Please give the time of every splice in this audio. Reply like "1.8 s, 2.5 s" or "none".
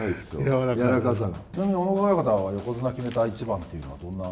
1.5 s